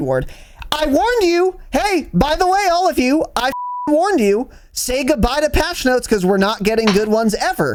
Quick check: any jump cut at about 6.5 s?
no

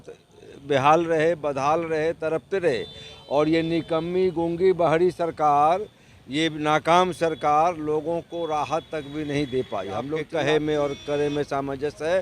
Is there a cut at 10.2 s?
yes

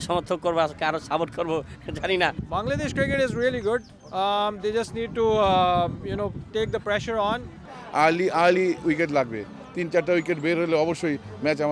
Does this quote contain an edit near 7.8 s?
yes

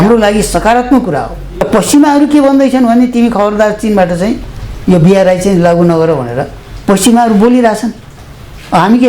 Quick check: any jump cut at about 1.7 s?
yes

